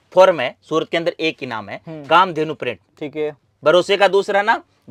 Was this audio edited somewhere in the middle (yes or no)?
no